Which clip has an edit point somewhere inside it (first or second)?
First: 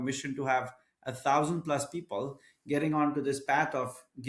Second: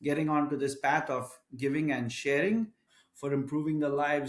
second